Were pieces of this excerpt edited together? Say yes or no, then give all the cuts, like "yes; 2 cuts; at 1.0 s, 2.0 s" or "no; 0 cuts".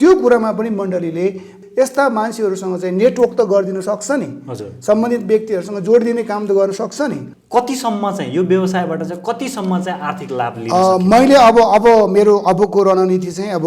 yes; 2 cuts; at 1.5 s, 7.3 s